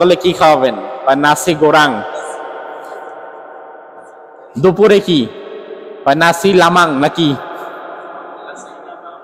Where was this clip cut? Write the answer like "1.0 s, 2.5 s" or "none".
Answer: none